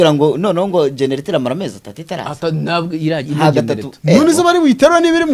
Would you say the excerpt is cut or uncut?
uncut